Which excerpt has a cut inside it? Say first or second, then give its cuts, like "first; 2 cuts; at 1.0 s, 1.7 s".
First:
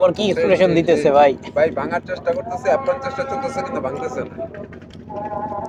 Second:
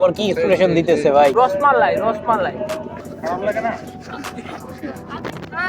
second; 2 cuts; at 1.3 s, 3.1 s